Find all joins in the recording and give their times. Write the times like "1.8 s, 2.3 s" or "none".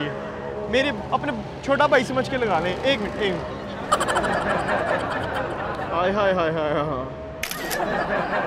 none